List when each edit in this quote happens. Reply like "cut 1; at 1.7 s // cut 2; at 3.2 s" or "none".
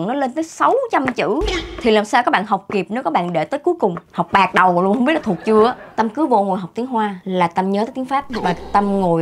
cut 1; at 5.8 s // cut 2; at 7.2 s // cut 3; at 8.3 s